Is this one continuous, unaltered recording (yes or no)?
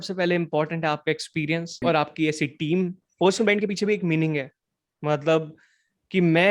no